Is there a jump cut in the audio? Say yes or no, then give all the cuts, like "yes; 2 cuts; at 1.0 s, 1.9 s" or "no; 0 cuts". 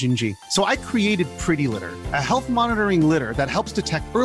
no; 0 cuts